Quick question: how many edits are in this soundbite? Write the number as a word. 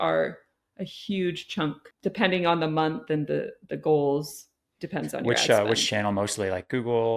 one